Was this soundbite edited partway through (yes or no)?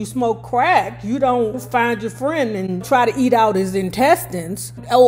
yes